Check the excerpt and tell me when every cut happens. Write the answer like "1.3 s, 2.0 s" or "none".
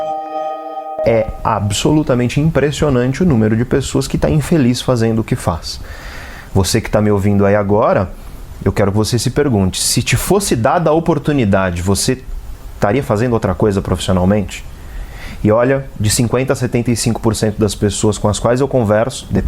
0.9 s